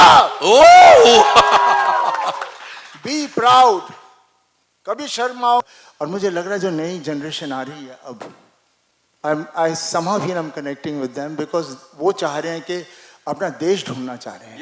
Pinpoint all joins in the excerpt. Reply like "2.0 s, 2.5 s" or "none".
5.6 s

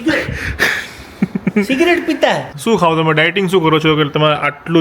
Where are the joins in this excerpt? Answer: 2.5 s

